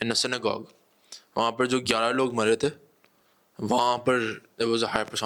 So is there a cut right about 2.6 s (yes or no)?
no